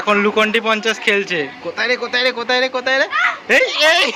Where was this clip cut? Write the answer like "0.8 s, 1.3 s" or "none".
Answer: none